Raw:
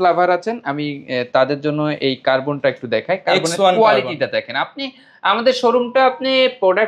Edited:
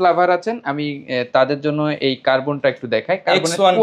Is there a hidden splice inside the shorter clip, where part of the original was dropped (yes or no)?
no